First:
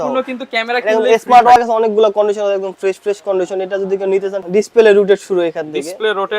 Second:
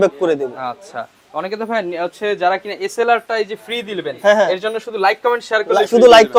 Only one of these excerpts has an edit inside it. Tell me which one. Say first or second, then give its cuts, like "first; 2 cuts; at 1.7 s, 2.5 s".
first; 2 cuts; at 1.6 s, 4.4 s